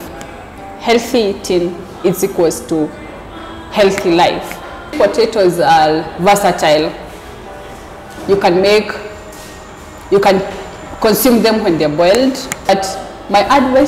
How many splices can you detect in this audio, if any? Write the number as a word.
two